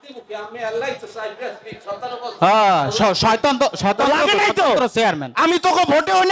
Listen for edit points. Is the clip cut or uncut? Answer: uncut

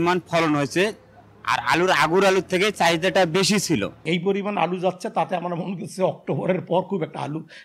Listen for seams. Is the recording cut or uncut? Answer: cut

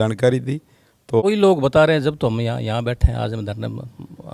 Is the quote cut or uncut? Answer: cut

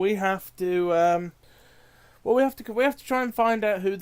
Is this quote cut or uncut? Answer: cut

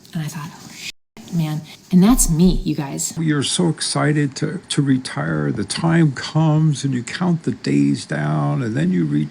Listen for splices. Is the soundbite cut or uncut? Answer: cut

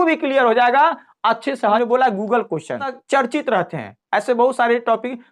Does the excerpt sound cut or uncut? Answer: cut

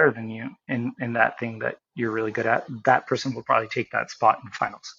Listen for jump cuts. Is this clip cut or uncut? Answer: uncut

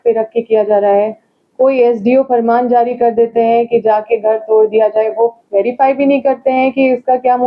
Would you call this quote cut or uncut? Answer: uncut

